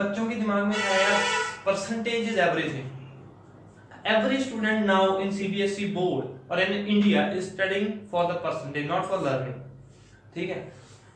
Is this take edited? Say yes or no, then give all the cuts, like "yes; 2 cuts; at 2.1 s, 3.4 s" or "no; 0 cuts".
no; 0 cuts